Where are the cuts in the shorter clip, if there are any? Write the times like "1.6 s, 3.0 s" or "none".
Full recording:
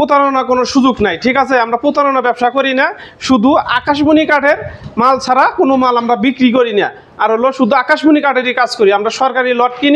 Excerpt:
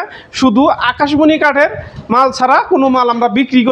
none